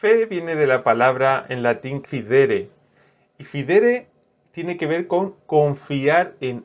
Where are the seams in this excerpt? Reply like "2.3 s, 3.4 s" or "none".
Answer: 2.0 s